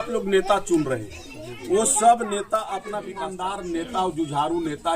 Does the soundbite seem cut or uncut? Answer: cut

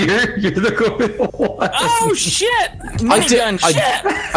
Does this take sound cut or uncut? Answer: uncut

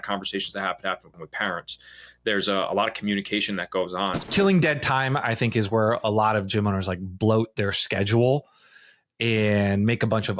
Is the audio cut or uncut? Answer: cut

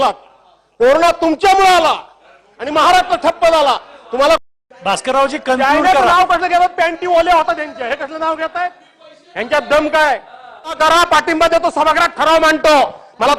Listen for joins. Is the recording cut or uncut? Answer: cut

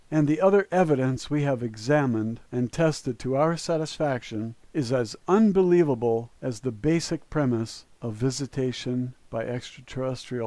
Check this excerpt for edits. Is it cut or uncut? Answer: cut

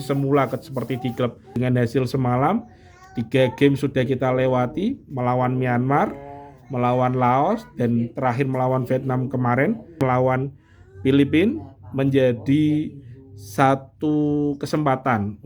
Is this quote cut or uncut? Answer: cut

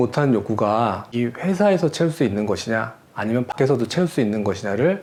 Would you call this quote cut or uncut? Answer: uncut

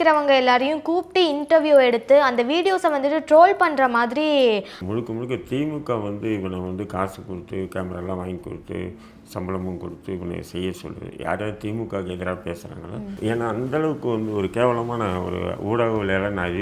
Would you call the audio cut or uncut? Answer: cut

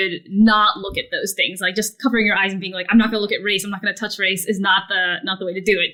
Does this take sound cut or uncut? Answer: uncut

